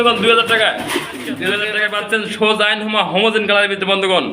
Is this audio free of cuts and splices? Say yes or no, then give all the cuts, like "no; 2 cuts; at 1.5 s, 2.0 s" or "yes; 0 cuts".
no; 1 cut; at 1.6 s